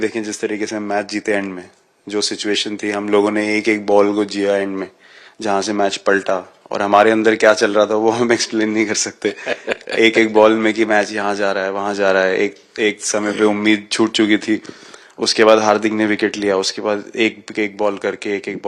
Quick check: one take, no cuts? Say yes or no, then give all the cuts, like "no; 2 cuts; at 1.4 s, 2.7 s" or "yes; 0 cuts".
yes; 0 cuts